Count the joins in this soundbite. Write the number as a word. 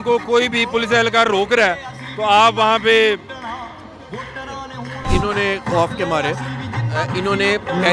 one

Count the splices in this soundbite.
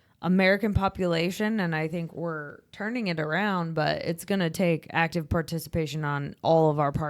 one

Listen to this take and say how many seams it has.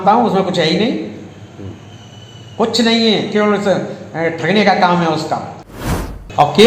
one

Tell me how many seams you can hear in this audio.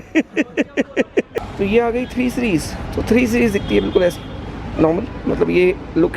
one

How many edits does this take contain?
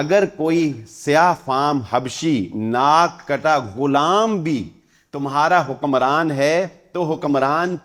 zero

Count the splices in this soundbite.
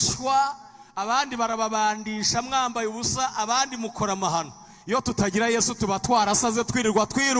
zero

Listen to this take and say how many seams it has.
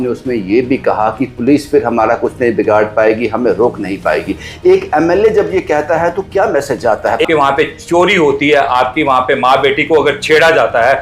one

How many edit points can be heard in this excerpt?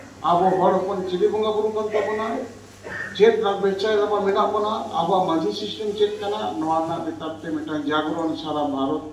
zero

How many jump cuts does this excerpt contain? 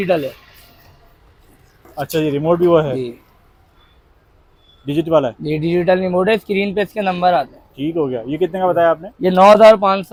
zero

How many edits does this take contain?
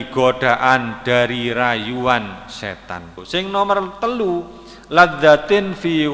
one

